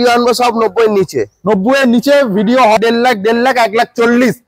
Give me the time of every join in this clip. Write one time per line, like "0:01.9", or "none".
0:02.8